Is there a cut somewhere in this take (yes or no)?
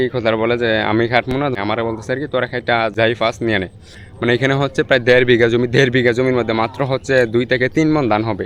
yes